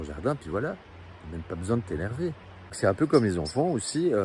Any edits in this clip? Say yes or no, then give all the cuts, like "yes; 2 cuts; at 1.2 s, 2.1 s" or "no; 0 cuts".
yes; 1 cut; at 2.6 s